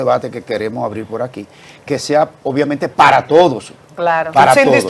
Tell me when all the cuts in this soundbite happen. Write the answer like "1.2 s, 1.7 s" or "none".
none